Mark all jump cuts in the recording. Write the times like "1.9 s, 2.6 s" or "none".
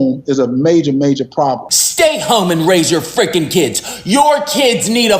1.6 s